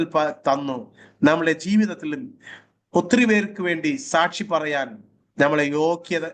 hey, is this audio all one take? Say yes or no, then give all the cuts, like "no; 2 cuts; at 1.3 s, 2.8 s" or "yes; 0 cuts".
yes; 0 cuts